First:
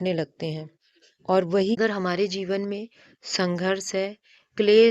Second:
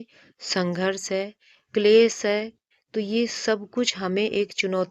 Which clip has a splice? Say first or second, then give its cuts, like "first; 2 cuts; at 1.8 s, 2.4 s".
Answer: first; 1 cut; at 1.8 s